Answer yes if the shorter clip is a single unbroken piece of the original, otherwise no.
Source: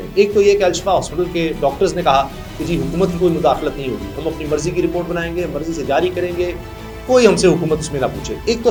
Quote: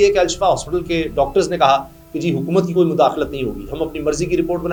yes